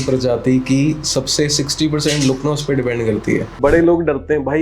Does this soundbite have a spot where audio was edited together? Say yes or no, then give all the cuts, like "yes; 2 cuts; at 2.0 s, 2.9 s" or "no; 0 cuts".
yes; 1 cut; at 3.6 s